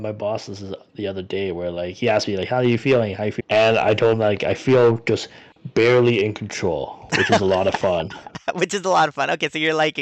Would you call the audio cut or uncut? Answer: cut